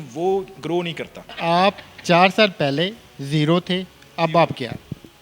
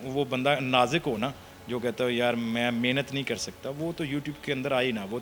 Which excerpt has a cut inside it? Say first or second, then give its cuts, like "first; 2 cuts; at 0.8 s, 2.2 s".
first; 1 cut; at 1.3 s